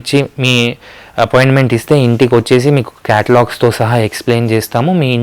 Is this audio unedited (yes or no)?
yes